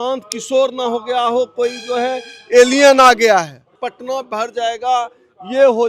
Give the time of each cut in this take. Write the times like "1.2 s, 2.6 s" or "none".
3.7 s

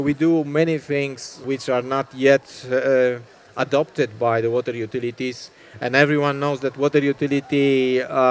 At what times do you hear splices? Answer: 1.4 s

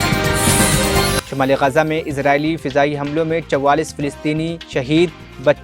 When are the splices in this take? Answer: none

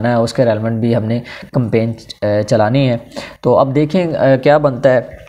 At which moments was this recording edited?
none

